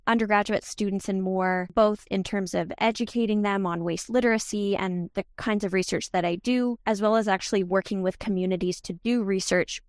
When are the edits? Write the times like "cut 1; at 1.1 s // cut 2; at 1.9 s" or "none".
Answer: cut 1; at 1.7 s

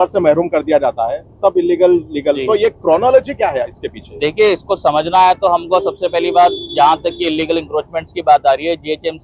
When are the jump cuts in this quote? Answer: none

